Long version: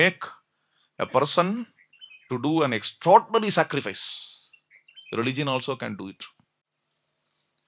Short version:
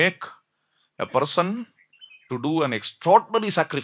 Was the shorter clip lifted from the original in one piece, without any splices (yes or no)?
yes